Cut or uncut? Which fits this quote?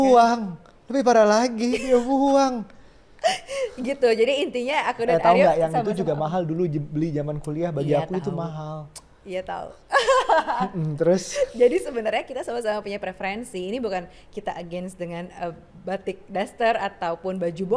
uncut